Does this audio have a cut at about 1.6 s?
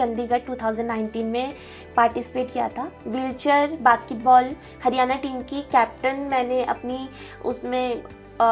no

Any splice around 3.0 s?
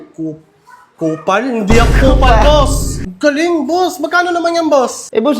yes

